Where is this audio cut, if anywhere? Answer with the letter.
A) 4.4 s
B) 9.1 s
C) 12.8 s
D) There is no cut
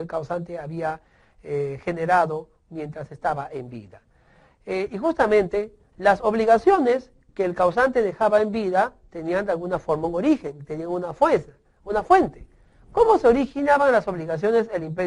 A